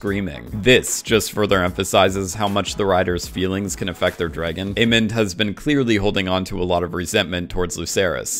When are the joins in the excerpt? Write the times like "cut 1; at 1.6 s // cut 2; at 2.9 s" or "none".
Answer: cut 1; at 4.7 s